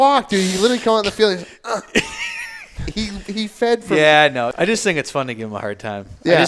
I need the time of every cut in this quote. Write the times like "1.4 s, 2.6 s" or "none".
4.5 s